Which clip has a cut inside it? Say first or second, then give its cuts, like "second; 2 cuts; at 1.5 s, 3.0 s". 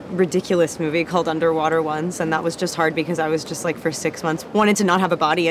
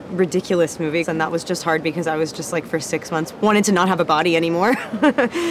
second; 1 cut; at 1.1 s